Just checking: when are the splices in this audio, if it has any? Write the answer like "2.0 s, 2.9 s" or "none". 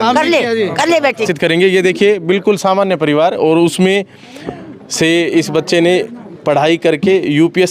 1.3 s